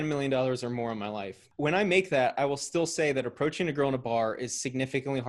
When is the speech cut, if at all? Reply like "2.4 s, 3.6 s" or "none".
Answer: 1.5 s

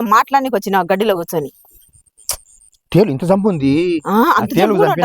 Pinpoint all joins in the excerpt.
2.8 s

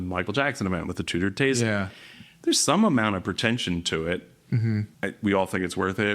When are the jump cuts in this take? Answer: 4.9 s

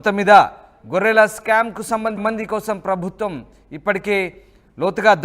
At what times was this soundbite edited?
2.2 s

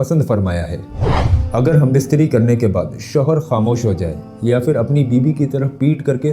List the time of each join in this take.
1.2 s

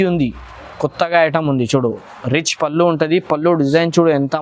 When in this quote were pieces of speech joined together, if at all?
2.0 s

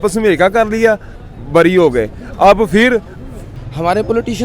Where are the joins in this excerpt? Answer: 3.5 s

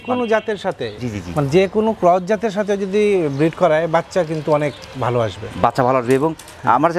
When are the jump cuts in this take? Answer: none

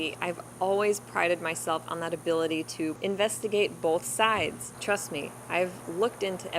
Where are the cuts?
3.0 s, 4.7 s

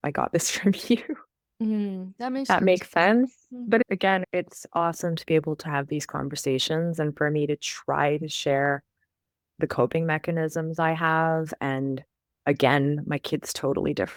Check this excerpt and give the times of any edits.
none

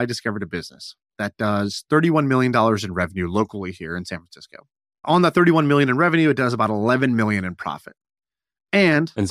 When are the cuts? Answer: 5.0 s

